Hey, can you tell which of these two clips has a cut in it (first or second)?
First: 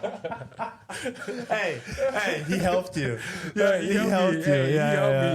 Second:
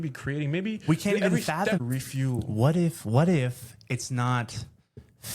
second